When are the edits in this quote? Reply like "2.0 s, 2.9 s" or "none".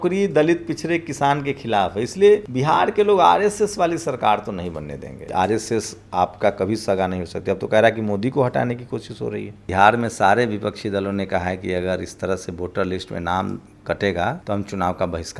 2.5 s, 5.2 s, 9.7 s, 14.4 s

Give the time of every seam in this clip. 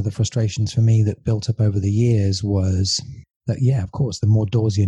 none

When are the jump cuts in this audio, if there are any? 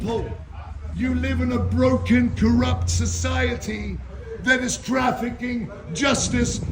none

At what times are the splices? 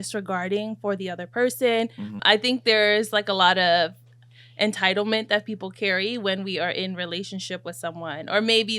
2.2 s

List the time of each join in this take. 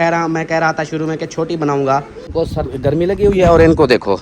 2.3 s

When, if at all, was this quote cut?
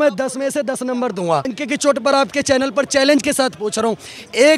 1.5 s

